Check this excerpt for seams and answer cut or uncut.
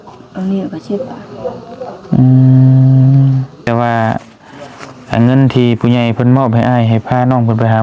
cut